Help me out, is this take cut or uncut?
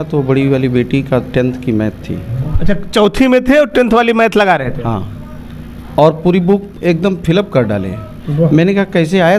uncut